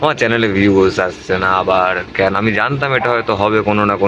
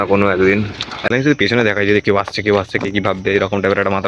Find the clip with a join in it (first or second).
second